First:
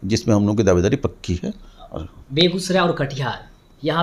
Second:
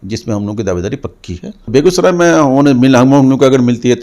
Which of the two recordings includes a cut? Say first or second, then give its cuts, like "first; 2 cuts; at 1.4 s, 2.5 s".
second; 1 cut; at 1.7 s